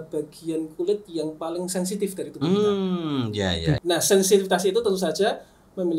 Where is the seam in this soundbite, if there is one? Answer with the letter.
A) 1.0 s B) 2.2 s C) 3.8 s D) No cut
C